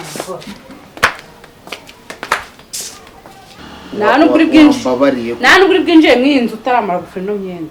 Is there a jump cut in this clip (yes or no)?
yes